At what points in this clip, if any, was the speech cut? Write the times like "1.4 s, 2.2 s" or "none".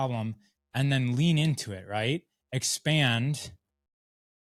none